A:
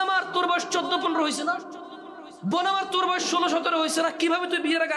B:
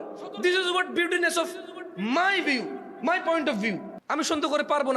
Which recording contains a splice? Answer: B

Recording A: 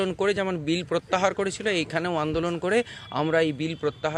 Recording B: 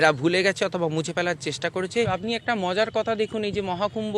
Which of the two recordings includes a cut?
B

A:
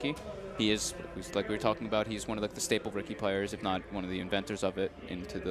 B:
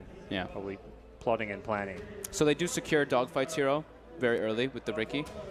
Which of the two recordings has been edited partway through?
B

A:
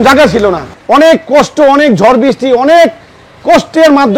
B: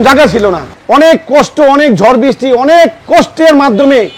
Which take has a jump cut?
B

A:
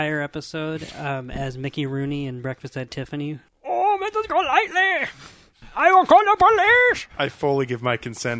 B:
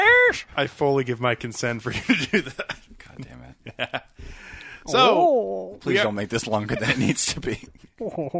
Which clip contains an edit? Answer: A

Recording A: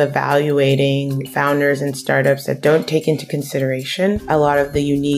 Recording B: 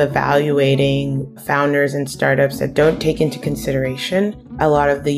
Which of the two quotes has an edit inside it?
A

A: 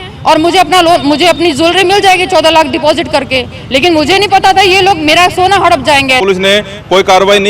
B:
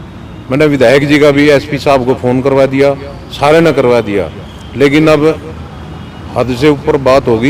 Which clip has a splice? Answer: A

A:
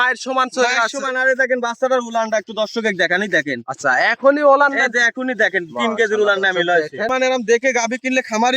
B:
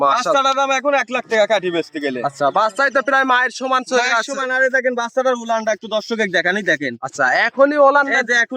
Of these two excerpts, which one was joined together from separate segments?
A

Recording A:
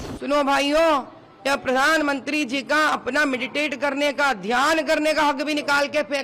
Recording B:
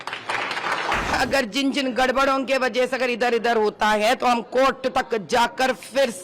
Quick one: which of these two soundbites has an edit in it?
B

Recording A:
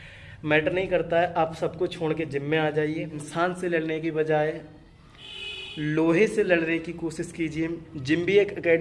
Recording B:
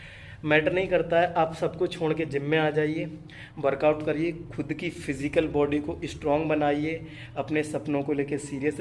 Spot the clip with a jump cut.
A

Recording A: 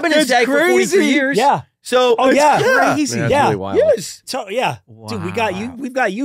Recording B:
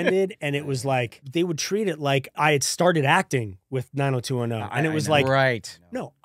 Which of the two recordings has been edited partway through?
B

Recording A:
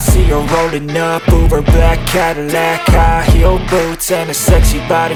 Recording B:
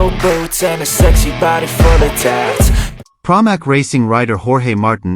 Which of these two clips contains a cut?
B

